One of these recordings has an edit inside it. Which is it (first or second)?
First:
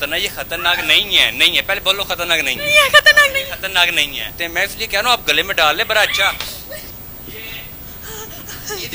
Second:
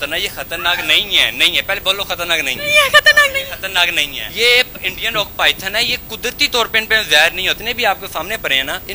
first